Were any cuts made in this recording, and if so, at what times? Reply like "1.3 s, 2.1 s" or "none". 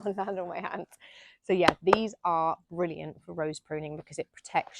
none